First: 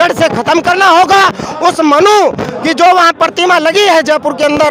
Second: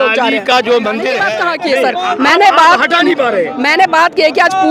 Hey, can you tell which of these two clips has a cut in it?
second; 1 cut; at 1.2 s

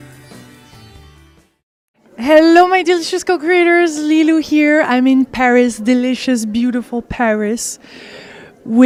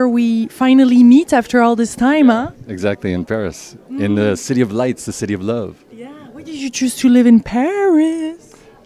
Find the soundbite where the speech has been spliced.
second; 1 cut; at 5.3 s

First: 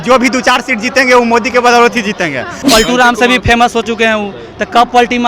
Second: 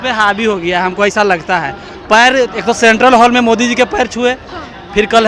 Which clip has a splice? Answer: first; 1 cut; at 2.5 s

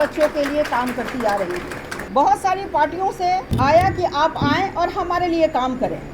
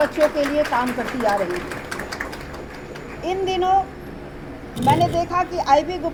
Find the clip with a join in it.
first; 2 cuts; at 1.9 s, 3.5 s

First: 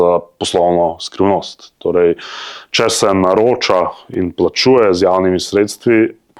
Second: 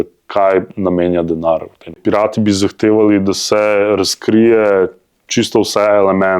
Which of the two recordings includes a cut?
second; 1 cut; at 2.0 s

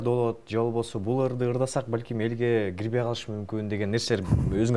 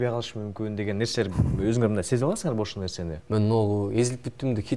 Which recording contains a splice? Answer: second; 1 cut; at 3.1 s

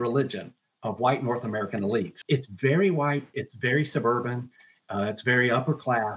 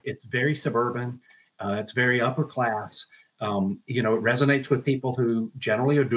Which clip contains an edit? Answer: first; 1 cut; at 2.2 s

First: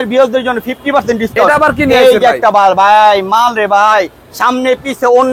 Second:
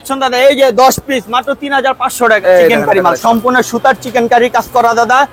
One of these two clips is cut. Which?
second; 1 cut; at 2.4 s

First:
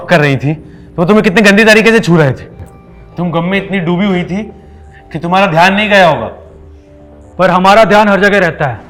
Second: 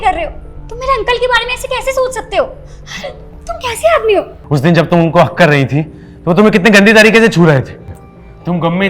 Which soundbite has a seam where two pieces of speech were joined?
second; 1 cut; at 4.4 s

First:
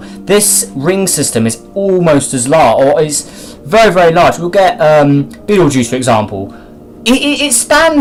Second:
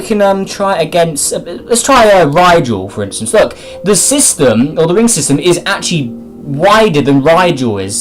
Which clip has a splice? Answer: second; 1 cut; at 6.9 s

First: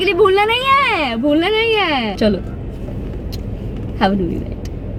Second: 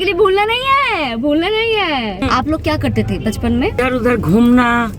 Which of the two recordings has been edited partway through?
second; 2 cuts; at 2.2 s, 3.8 s

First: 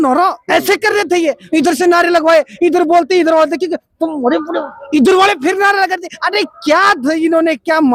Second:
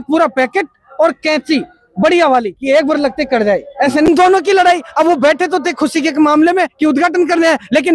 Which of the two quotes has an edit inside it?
second; 1 cut; at 4.1 s

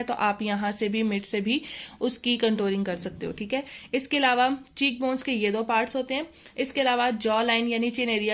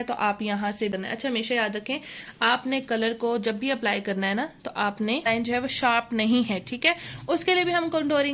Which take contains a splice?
second; 2 cuts; at 0.9 s, 5.3 s

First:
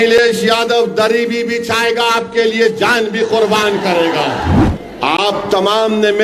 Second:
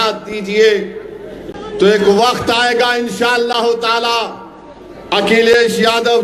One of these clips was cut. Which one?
first; 1 cut; at 4.6 s

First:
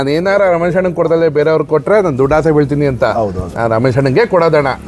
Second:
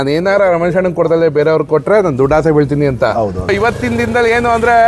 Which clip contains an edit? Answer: second; 1 cut; at 3.5 s

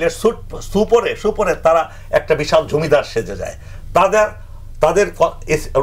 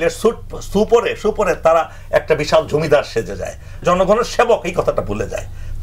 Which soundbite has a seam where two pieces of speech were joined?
second; 1 cut; at 3.8 s

